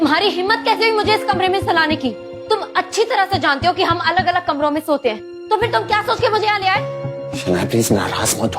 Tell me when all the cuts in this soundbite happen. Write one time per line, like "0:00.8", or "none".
none